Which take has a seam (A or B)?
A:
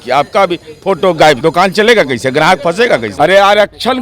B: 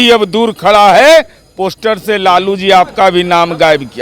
A